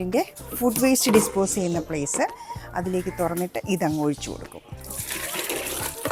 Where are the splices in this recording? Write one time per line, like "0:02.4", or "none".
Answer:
none